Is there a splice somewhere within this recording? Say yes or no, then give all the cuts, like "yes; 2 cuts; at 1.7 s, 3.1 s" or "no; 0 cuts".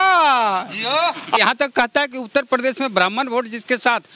yes; 1 cut; at 1.4 s